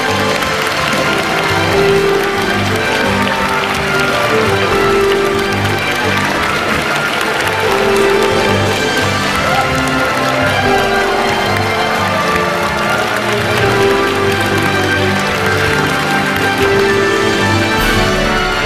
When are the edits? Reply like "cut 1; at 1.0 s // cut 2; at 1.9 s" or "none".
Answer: none